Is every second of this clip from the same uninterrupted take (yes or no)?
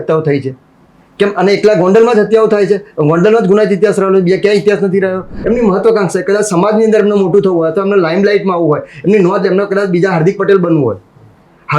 no